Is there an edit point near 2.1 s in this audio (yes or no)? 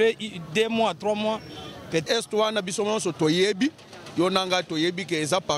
yes